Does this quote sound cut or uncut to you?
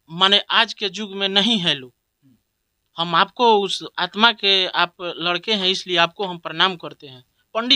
uncut